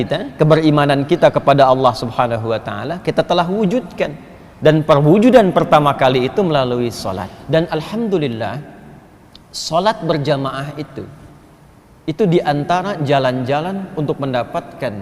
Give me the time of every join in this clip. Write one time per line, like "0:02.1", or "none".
0:07.4